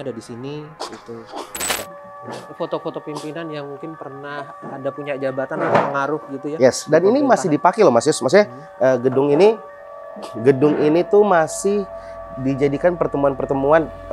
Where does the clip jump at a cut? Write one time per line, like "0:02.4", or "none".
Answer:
0:01.9